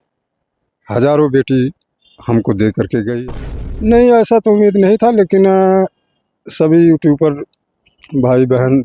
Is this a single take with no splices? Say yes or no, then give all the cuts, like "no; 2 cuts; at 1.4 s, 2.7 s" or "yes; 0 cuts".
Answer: no; 1 cut; at 3.2 s